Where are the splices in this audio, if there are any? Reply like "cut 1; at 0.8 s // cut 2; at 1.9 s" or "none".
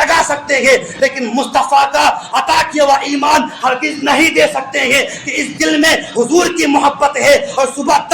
cut 1; at 2.6 s